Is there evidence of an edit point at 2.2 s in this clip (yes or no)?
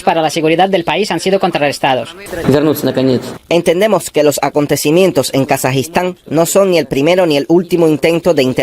yes